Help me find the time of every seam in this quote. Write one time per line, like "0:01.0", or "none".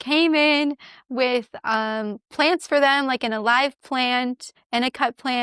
0:04.5